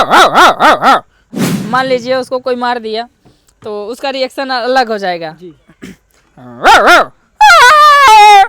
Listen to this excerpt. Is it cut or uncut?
cut